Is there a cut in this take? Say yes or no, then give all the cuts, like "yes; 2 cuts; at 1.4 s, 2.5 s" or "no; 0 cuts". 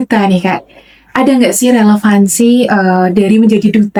no; 0 cuts